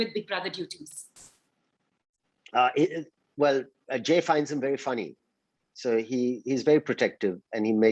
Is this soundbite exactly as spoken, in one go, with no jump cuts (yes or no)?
yes